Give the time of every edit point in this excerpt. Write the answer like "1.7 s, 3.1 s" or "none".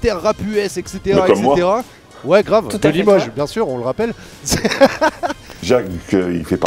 5.6 s